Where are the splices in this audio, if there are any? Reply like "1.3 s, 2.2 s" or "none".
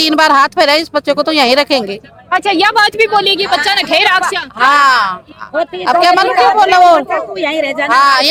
none